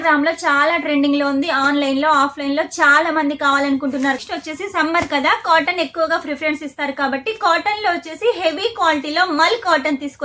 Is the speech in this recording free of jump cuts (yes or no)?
no